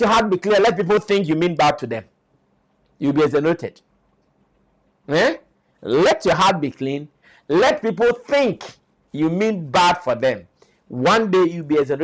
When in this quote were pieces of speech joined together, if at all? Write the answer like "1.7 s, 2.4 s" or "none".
none